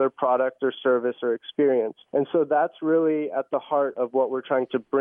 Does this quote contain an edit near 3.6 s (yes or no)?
no